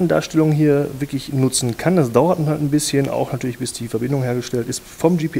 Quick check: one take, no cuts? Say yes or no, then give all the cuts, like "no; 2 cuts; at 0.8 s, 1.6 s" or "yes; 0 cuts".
no; 1 cut; at 4.0 s